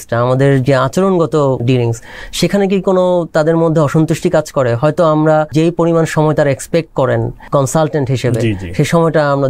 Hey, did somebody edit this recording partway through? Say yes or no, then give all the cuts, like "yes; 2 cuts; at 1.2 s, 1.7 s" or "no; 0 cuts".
yes; 3 cuts; at 1.6 s, 5.5 s, 7.4 s